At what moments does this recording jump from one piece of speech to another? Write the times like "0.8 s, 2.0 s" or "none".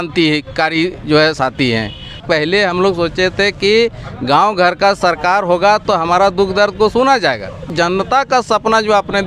2.2 s, 7.7 s